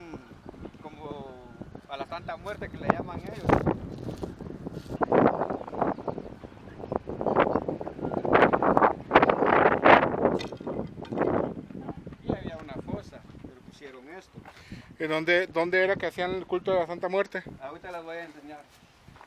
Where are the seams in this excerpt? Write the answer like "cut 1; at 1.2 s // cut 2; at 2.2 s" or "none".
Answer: none